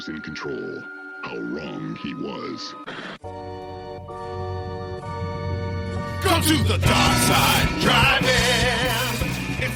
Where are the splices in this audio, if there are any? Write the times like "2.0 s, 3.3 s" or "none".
none